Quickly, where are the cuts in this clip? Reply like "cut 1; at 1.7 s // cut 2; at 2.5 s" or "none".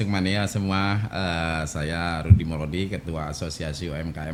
none